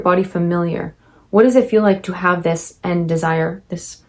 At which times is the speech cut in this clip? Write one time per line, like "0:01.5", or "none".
none